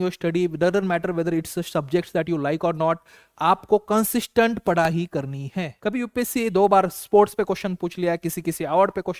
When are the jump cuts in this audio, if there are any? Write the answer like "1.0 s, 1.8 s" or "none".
5.7 s

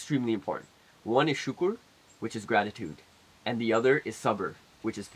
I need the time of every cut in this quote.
none

